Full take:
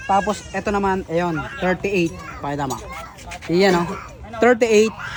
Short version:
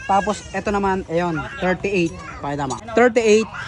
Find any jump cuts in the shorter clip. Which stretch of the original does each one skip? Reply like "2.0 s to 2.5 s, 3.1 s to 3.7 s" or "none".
2.8 s to 4.2 s